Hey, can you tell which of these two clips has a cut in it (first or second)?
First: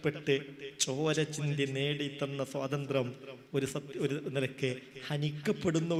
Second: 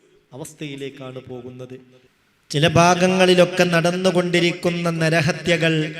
second